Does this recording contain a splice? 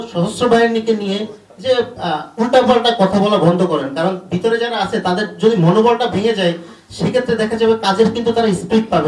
no; 0 cuts

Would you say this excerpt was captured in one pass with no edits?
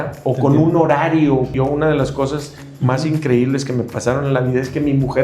no; 1 cut; at 1.5 s

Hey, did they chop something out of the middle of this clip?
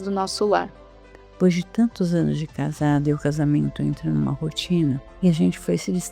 yes; 2 cuts; at 1.1 s, 5.1 s

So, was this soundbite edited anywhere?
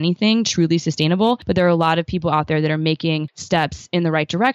yes; 2 cuts; at 1.4 s, 3.3 s

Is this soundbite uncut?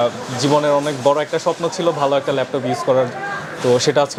yes; 0 cuts

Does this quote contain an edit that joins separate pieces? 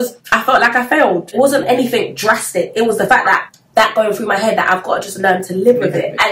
yes; 1 cut; at 1.3 s

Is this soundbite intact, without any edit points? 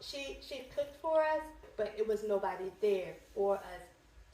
no; 1 cut; at 1.7 s

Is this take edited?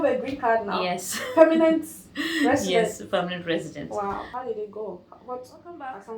yes; 1 cut; at 4.3 s

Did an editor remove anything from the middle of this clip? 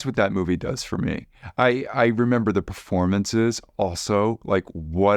no; 0 cuts

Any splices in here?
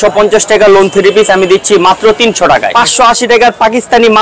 yes; 1 cut; at 2.8 s

